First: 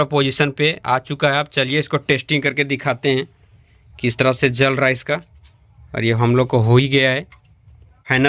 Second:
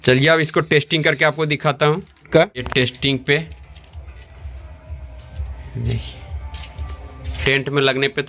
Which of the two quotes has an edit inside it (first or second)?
second